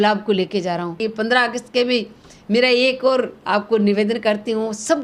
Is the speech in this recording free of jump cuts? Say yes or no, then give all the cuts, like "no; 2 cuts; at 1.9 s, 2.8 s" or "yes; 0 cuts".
no; 1 cut; at 1.0 s